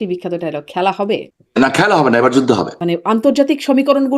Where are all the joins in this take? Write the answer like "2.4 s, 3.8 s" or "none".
1.4 s, 2.8 s